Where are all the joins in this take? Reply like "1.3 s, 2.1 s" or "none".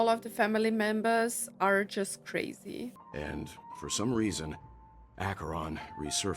3.0 s